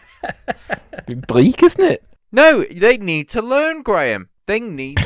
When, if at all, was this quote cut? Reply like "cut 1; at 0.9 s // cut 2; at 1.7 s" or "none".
cut 1; at 2.1 s